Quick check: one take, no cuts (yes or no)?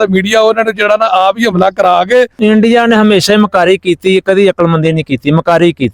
no